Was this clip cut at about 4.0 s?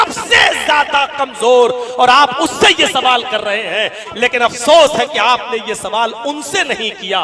yes; 1 cut; at 4.0 s

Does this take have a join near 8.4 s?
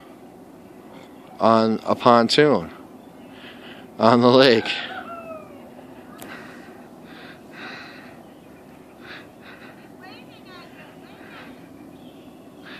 no; 1 cut; at 11.3 s

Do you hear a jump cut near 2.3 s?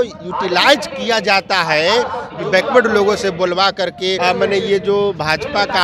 yes; 2 cuts; at 2.3 s, 4.2 s

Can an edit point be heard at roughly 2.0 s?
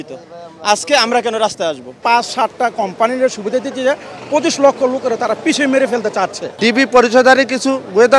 yes; 2 cuts; at 2.0 s, 6.4 s

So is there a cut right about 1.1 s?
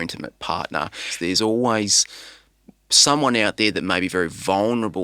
yes; 1 cut; at 1.1 s

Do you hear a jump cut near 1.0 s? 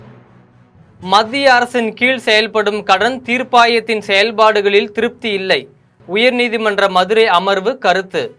yes; 1 cut; at 1.0 s

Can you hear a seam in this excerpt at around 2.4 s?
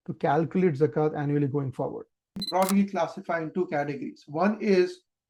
yes; 1 cut; at 2.4 s

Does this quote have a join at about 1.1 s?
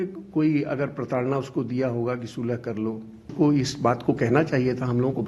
no; 1 cut; at 3.3 s

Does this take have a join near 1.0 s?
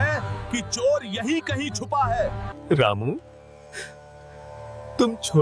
no; 1 cut; at 2.4 s

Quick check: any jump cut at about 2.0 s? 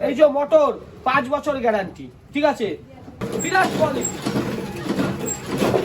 no; 1 cut; at 3.3 s

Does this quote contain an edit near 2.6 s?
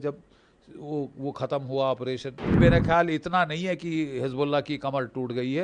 yes; 1 cut; at 2.6 s

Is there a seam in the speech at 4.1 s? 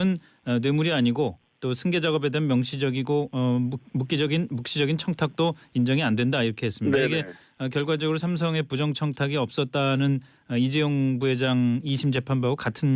yes; 1 cut; at 4.1 s

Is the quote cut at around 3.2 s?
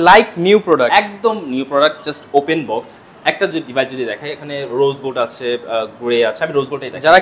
no; 0 cuts

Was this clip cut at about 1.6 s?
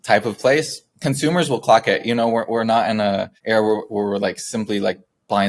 no; 1 cut; at 3.3 s

